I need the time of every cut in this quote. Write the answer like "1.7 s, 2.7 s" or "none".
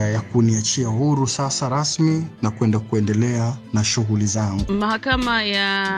4.6 s